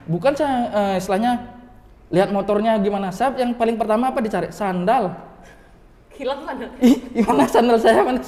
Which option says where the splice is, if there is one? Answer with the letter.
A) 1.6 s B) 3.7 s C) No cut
C